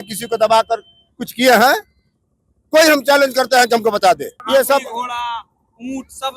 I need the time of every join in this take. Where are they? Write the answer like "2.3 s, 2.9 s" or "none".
4.3 s

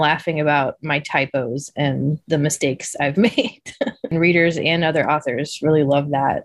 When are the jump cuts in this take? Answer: 4.1 s

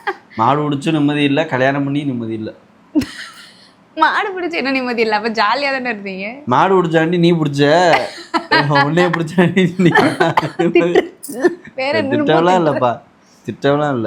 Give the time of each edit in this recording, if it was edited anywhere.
none

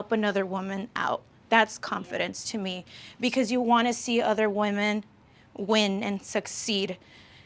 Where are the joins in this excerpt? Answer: none

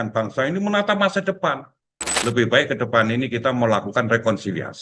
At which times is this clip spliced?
2.0 s

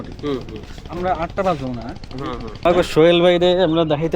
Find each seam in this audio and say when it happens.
2.5 s

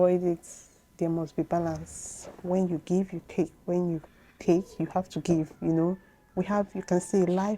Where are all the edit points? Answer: none

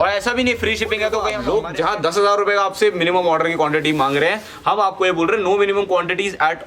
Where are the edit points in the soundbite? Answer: 1.3 s

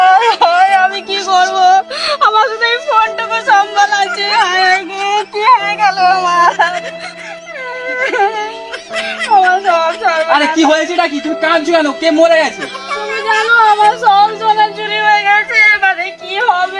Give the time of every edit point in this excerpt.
none

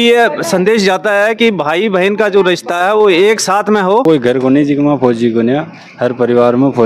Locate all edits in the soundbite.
4.0 s

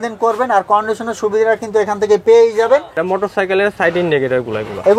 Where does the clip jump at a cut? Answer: 2.9 s

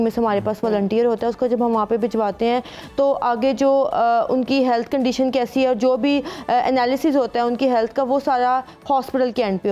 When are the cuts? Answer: none

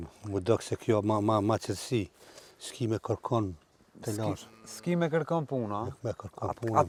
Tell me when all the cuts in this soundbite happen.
none

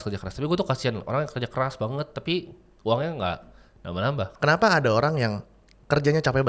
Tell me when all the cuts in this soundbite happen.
4.3 s

